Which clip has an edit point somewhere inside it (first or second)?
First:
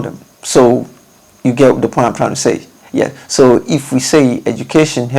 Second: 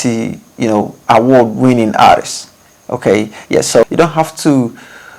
second